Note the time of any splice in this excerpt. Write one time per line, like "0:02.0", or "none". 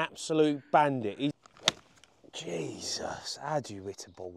0:01.3